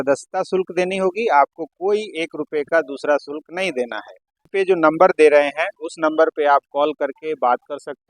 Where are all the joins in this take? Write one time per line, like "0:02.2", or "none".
0:04.5

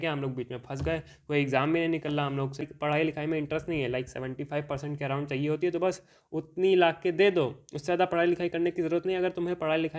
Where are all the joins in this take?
0:02.7

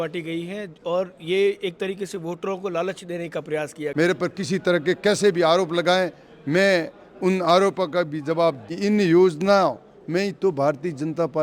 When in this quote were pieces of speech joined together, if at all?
0:03.8
0:08.7

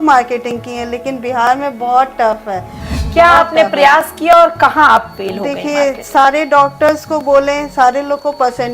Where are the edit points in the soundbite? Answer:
0:02.8

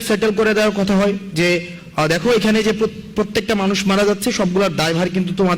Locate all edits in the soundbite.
none

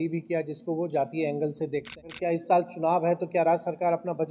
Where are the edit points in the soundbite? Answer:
0:02.0

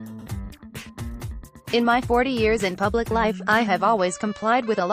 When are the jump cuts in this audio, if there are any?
0:01.0

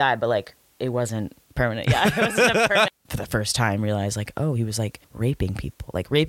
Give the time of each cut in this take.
0:01.5
0:02.9
0:05.0

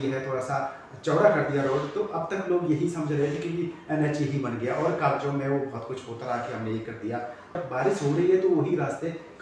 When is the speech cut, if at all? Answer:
0:07.6

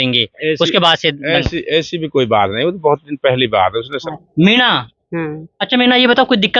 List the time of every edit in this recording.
0:04.1

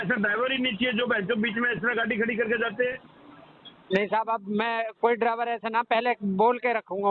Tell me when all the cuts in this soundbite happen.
none

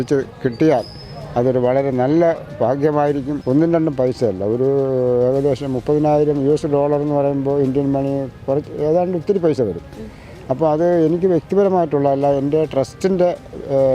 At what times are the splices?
0:03.3

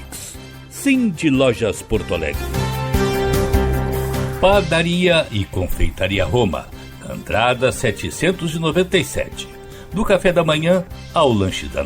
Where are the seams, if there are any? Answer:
0:02.4
0:03.3
0:04.1

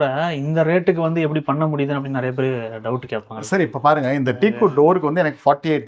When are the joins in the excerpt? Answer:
none

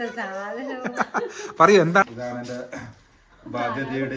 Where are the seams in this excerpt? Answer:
0:02.0

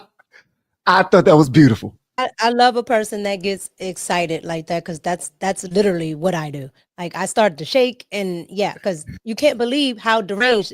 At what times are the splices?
0:02.2

